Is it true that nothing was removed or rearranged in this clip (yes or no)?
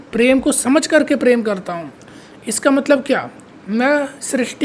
yes